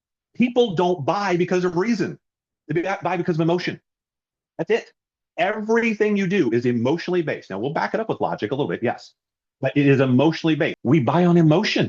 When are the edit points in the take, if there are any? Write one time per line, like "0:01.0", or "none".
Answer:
0:10.8